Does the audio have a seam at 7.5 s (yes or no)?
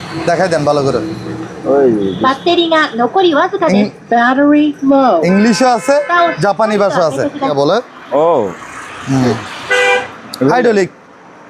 yes